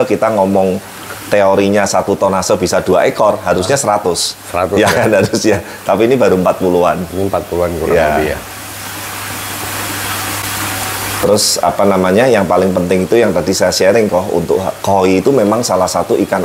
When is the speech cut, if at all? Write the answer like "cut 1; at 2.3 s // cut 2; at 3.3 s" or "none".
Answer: none